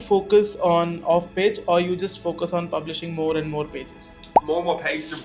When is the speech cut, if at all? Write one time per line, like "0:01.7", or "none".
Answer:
none